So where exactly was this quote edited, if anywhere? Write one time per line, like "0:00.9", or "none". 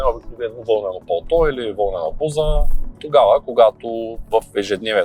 none